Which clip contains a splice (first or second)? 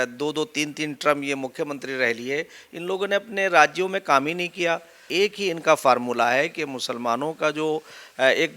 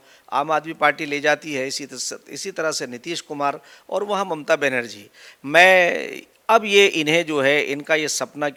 first